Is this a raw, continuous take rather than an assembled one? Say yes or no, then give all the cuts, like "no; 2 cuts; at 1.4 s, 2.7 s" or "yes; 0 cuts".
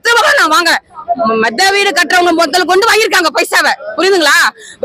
yes; 0 cuts